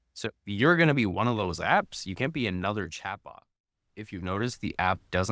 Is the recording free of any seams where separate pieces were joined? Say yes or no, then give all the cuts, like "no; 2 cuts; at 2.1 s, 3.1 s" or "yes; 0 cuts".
no; 1 cut; at 3.7 s